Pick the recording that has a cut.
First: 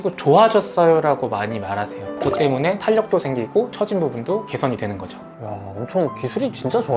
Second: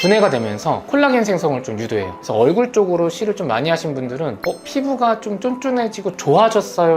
first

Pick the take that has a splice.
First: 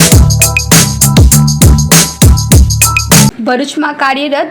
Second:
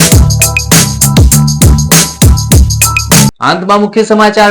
first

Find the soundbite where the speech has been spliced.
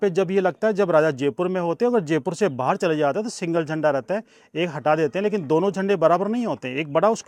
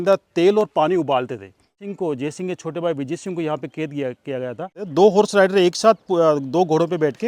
second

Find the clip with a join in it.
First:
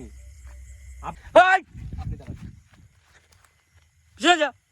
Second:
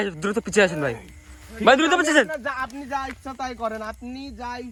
first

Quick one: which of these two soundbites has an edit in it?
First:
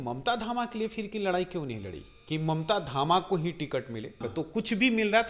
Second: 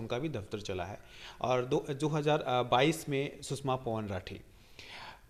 first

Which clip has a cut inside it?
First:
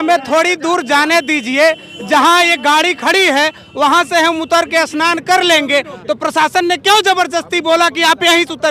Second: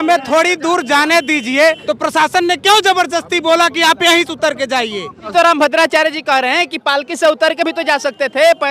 second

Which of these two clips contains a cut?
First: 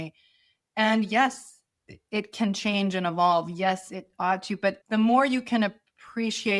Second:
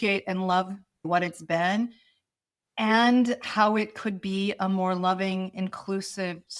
first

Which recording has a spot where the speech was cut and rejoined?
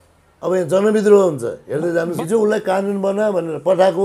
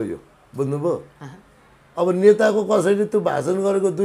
first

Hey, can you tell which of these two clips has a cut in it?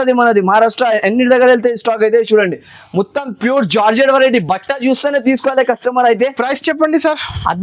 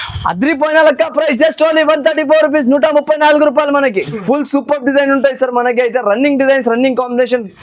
second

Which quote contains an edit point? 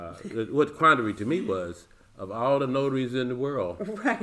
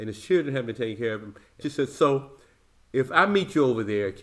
second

